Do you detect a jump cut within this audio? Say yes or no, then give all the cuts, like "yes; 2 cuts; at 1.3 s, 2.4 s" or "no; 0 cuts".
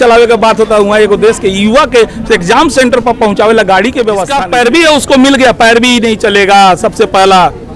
yes; 1 cut; at 4.3 s